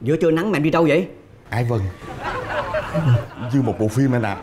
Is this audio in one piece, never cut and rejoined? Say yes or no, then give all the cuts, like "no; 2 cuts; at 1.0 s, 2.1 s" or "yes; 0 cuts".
yes; 0 cuts